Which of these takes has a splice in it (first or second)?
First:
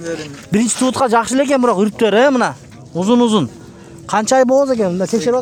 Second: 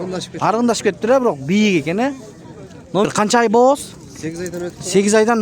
second